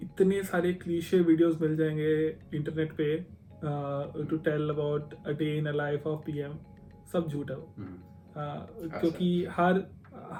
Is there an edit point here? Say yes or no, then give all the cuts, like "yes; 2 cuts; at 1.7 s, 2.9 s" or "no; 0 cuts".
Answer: no; 0 cuts